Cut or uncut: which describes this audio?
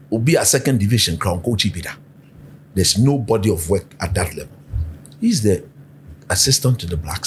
uncut